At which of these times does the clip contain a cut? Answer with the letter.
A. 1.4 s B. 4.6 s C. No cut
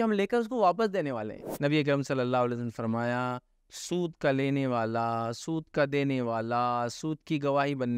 A